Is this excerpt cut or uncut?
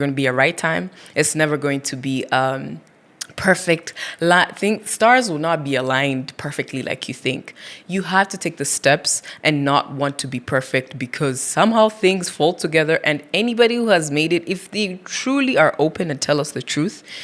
uncut